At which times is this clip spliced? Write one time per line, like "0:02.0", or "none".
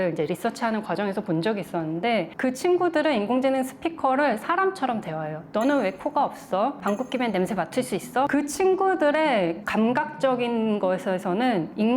0:08.3